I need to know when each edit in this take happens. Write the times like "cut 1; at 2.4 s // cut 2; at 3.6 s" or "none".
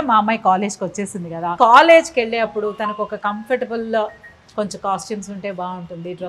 cut 1; at 1.6 s

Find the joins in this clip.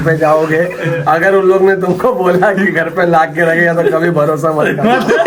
none

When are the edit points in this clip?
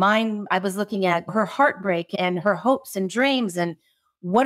cut 1; at 2.1 s

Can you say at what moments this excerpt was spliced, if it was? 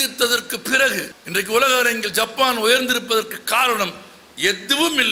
cut 1; at 1.2 s

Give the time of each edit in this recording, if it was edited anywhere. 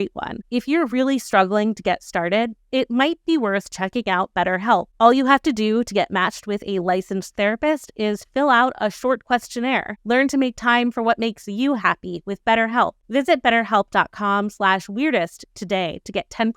cut 1; at 4.9 s // cut 2; at 9.9 s // cut 3; at 13.0 s

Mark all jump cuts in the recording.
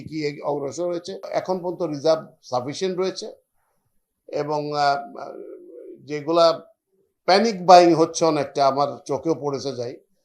cut 1; at 1.3 s

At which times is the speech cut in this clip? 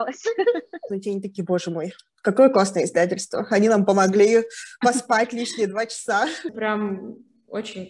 cut 1; at 0.9 s // cut 2; at 6.5 s

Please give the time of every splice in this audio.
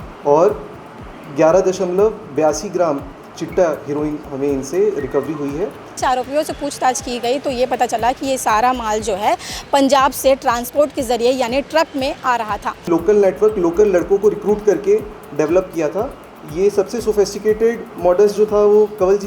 cut 1; at 6.0 s // cut 2; at 12.9 s

